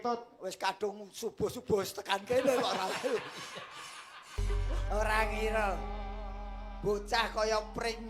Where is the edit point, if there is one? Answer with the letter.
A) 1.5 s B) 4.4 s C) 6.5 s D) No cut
B